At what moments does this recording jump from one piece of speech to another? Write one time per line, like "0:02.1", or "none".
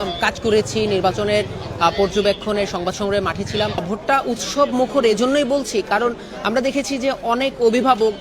0:03.8